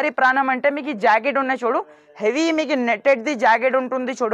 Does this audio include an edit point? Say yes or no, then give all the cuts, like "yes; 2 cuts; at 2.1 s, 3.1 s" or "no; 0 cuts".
no; 0 cuts